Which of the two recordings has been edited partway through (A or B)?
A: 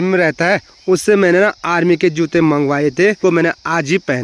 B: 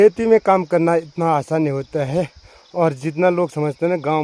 A